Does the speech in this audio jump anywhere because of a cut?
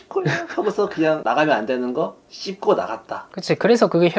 no; 0 cuts

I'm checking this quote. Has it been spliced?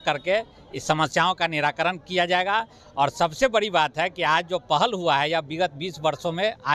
no; 0 cuts

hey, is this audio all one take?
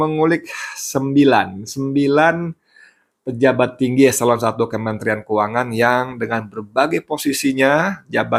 yes; 0 cuts

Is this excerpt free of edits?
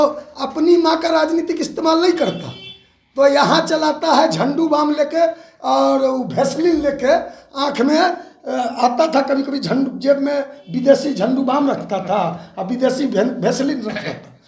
yes; 0 cuts

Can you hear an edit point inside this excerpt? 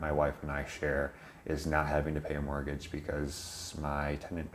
no; 0 cuts

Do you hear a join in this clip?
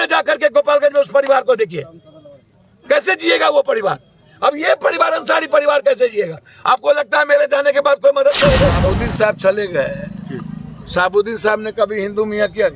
yes; 1 cut; at 8.8 s

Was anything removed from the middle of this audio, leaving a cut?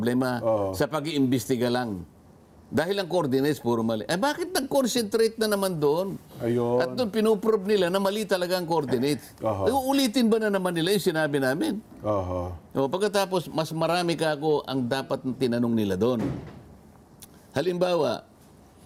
no; 0 cuts

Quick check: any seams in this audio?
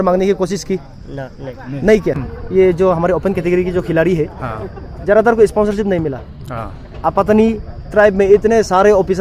yes; 1 cut; at 2.2 s

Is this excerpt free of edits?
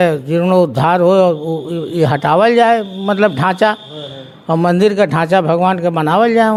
yes; 0 cuts

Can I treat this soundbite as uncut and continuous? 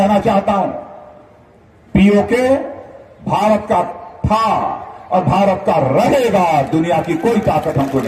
yes; 0 cuts

